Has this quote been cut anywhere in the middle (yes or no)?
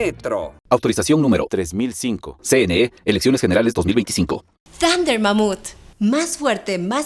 no